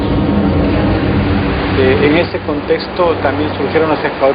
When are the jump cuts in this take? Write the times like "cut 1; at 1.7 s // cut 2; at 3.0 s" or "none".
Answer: cut 1; at 2.1 s